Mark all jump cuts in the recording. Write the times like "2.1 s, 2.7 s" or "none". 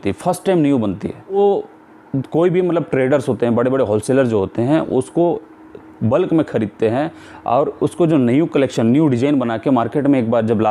1.3 s